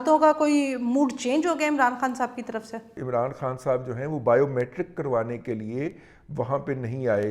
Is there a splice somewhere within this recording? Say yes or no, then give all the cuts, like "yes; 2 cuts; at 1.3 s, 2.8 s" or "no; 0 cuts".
yes; 1 cut; at 3.0 s